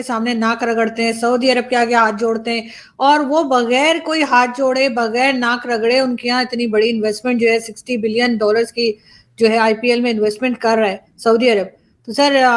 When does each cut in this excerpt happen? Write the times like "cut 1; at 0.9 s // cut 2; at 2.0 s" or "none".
none